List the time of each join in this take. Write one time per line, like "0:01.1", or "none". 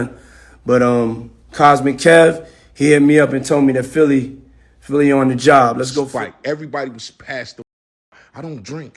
0:06.1

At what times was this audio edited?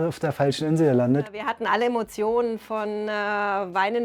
0:01.4

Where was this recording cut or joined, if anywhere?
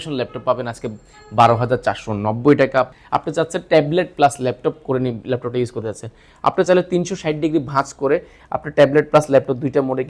0:02.9

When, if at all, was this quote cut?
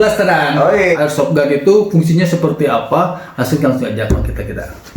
0:01.0

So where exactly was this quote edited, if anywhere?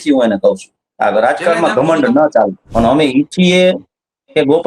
0:02.6

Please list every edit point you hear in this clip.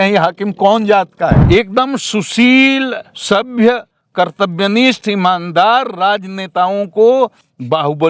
0:01.4

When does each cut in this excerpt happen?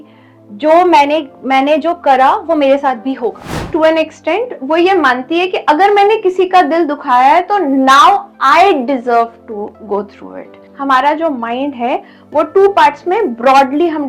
0:03.6
0:10.7

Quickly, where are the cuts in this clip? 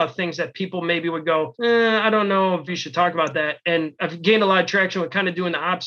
0:01.5
0:02.7
0:04.0

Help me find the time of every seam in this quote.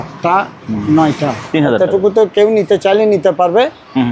0:01.4

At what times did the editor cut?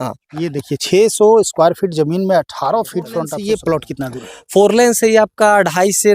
0:03.2

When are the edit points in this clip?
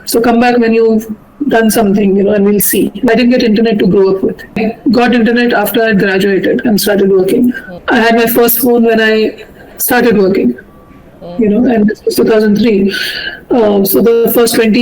0:03.1
0:04.6
0:07.7

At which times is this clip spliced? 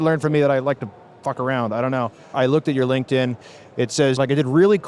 0:02.2
0:04.2

